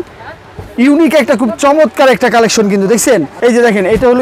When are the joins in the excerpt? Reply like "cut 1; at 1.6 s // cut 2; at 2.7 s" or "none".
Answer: cut 1; at 3.3 s